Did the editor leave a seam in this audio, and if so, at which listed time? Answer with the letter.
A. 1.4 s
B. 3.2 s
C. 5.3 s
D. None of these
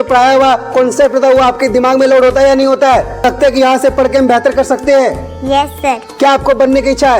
B